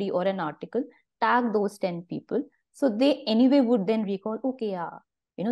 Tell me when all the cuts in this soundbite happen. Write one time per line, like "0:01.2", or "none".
none